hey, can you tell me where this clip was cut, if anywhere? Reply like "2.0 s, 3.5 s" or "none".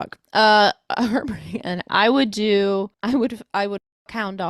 2.9 s